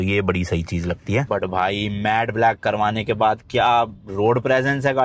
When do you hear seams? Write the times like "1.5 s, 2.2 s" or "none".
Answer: 1.3 s

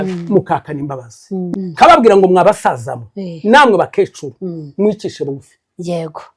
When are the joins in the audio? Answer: 1.5 s

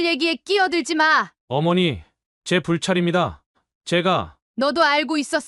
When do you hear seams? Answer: 1.4 s

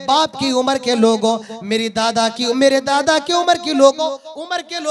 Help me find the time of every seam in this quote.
none

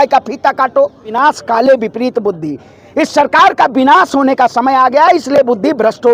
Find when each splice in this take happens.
1.1 s

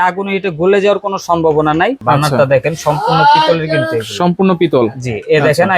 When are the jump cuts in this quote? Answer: 2.0 s

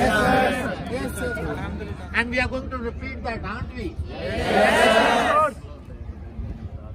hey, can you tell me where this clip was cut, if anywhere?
2.0 s

